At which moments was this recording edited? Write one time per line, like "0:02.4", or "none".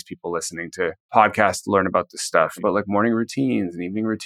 0:01.0
0:02.6